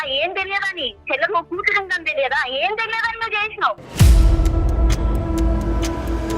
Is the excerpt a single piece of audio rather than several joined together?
no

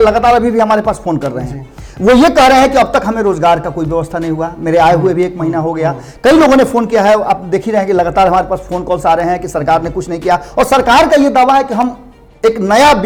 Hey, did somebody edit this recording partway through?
no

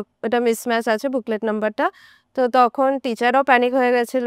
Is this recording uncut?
yes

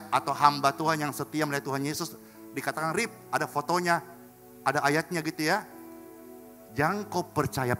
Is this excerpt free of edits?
yes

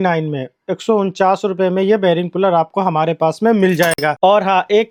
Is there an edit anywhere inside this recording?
no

